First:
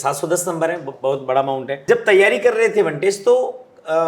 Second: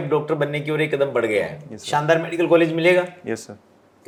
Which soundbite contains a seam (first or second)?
first